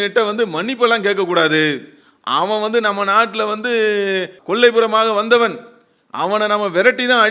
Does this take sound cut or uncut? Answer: cut